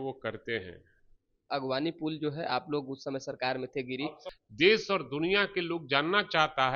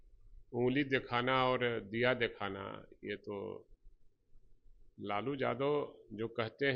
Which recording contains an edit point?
first; 2 cuts; at 1.4 s, 4.2 s

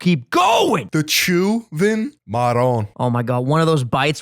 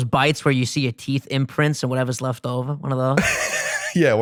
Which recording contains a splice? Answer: first; 3 cuts; at 0.8 s, 2.2 s, 2.9 s

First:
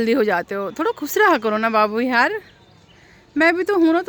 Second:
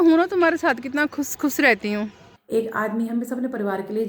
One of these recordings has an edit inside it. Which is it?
second; 1 cut; at 2.3 s

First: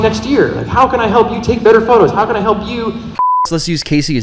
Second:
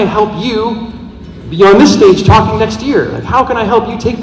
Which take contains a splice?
first; 1 cut; at 3.3 s

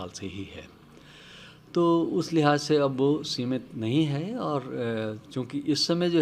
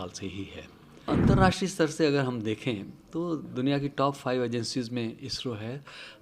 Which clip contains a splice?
second; 1 cut; at 1.0 s

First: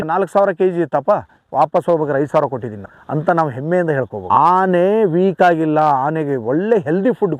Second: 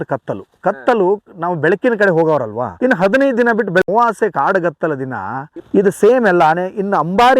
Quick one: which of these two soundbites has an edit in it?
second; 1 cut; at 5.4 s

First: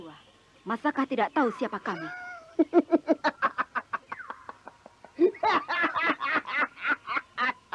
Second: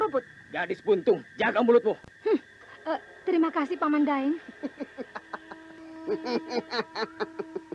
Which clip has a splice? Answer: second; 3 cuts; at 1.3 s, 2.2 s, 5.7 s

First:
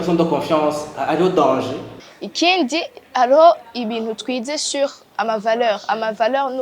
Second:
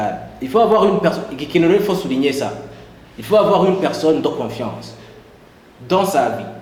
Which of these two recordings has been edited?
first; 1 cut; at 2.0 s

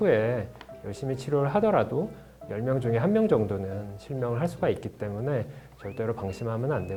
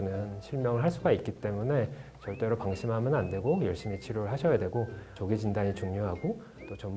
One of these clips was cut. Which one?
second; 1 cut; at 5.1 s

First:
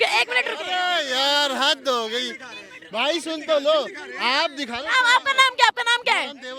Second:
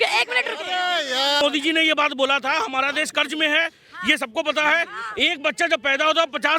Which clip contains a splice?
second; 1 cut; at 1.4 s

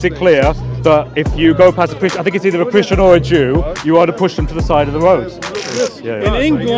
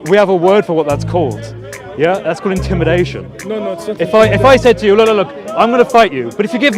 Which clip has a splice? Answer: first; 1 cut; at 5.7 s

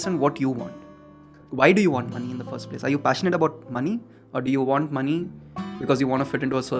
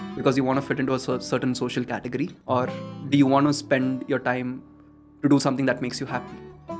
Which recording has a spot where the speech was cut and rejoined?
second; 1 cut; at 2.4 s

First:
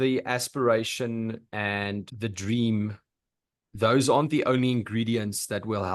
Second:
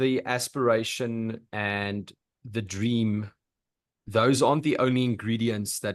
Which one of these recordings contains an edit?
first; 1 cut; at 2.1 s

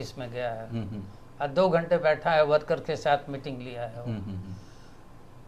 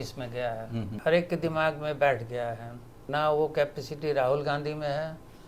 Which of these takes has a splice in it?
second; 2 cuts; at 0.9 s, 3.0 s

